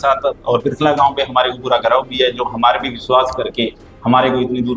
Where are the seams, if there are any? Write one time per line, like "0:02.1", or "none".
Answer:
none